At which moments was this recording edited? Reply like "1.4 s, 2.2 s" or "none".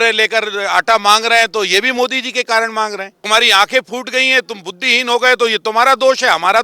3.3 s